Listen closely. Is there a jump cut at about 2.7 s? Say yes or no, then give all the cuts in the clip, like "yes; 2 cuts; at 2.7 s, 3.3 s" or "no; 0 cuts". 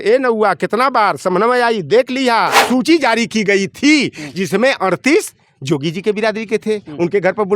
yes; 1 cut; at 2.7 s